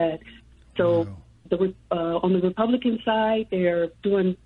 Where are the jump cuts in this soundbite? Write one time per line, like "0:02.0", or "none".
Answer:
none